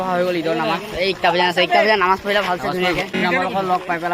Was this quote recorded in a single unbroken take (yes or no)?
no